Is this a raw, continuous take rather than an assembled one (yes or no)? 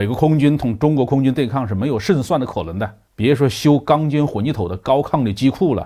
yes